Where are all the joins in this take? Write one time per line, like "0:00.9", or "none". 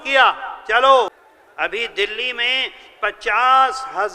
0:01.1

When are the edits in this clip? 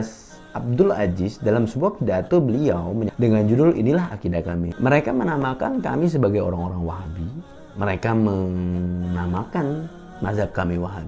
0:03.1
0:04.7

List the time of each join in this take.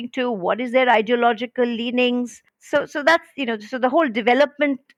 none

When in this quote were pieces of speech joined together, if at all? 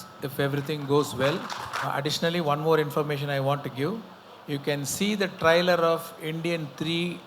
0:01.9

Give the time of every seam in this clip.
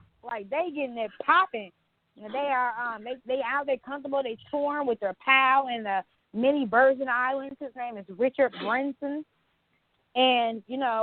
none

